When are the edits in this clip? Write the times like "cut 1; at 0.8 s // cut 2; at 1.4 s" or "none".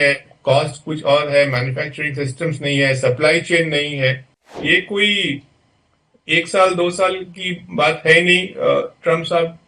cut 1; at 4.6 s